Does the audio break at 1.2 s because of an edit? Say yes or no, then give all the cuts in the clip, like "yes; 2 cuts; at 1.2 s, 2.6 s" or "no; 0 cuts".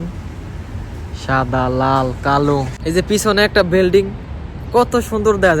no; 1 cut; at 2.8 s